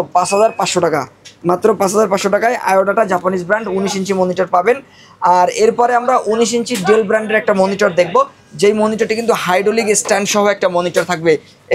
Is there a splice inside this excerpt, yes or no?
no